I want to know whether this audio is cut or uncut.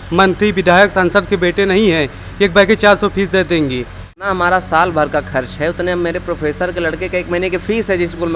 cut